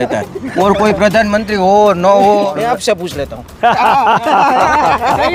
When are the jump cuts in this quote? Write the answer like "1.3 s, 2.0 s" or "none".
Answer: 2.6 s